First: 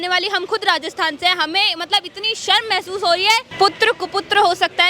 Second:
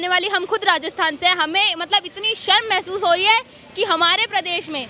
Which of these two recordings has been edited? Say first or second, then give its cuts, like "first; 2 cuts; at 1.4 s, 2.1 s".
first; 1 cut; at 3.5 s